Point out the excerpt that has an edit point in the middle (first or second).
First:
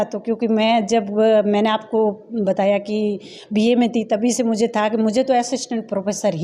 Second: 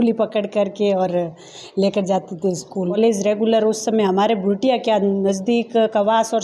second